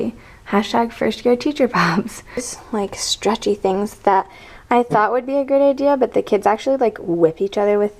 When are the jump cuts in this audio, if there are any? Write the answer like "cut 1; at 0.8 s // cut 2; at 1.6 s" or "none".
cut 1; at 2.5 s